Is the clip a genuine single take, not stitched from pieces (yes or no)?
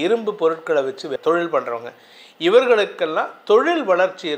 no